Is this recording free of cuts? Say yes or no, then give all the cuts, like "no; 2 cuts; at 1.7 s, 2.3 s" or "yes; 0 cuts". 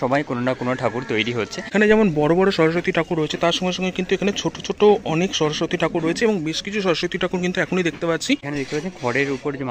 no; 2 cuts; at 1.6 s, 8.5 s